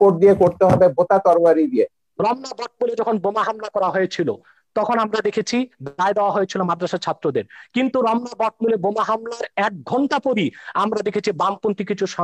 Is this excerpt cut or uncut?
cut